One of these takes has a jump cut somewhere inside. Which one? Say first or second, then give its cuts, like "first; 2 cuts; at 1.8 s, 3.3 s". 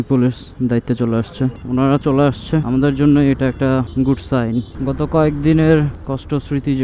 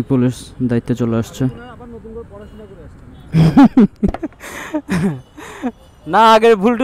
first; 2 cuts; at 1.6 s, 4.8 s